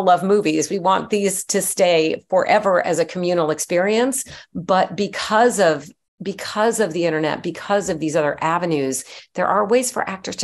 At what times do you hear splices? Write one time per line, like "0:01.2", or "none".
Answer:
none

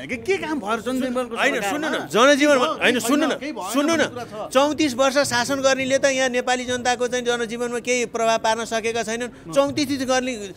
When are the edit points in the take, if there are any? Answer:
none

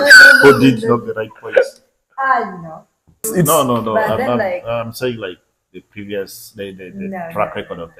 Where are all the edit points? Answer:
0:03.2

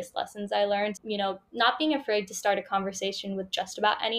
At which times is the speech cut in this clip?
0:01.0

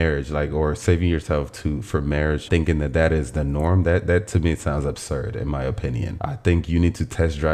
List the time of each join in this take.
0:02.5
0:06.1

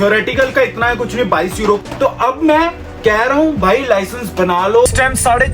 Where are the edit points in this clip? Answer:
0:01.8
0:04.9

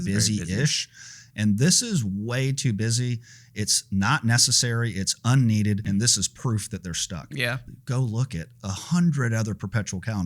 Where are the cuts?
0:07.6

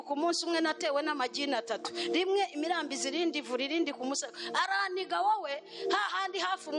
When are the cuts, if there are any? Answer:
none

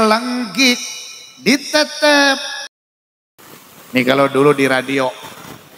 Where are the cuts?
0:02.9

